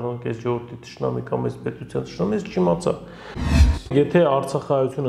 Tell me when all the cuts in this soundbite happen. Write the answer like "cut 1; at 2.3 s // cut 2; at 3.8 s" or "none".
cut 1; at 3.4 s